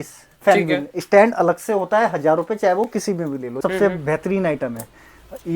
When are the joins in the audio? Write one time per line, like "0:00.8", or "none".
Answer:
0:03.6